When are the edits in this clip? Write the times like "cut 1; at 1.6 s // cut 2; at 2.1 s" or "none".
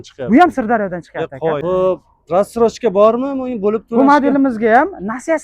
cut 1; at 1.6 s